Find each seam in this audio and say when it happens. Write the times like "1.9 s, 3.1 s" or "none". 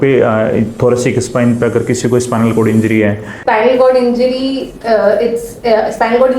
3.4 s